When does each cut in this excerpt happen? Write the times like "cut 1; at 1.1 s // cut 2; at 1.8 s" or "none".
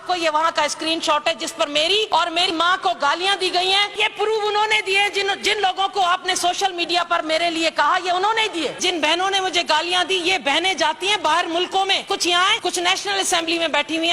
cut 1; at 2.1 s // cut 2; at 4.0 s // cut 3; at 8.8 s // cut 4; at 12.4 s